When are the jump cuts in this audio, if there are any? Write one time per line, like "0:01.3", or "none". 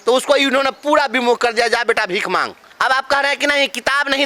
0:02.6